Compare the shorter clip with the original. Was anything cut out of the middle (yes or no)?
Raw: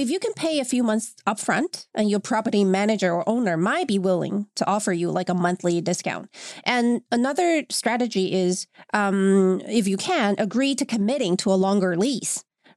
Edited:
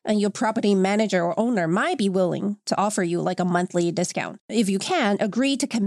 yes